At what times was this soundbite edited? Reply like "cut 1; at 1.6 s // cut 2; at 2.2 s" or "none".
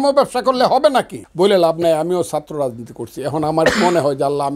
cut 1; at 1.2 s